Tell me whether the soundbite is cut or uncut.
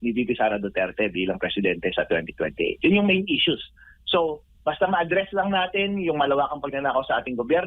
uncut